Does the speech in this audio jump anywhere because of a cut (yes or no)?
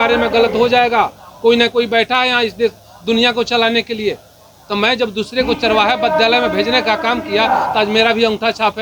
no